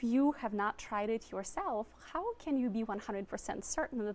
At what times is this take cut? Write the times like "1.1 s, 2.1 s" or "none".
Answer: none